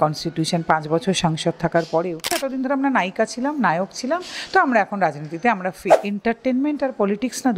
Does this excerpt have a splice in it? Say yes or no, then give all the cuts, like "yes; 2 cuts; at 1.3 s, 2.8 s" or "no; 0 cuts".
yes; 2 cuts; at 2.4 s, 6.0 s